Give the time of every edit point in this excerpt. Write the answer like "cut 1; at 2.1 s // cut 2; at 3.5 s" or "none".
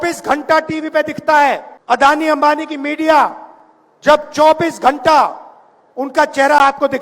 cut 1; at 1.7 s